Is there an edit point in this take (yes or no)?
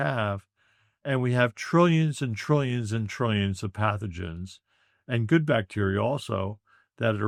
no